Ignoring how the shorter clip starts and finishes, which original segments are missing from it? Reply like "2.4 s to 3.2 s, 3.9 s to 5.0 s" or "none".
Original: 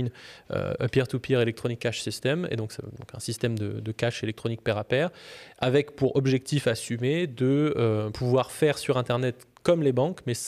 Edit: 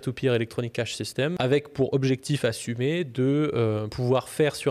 2.4 s to 5.6 s